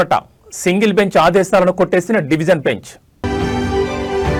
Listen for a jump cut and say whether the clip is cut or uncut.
uncut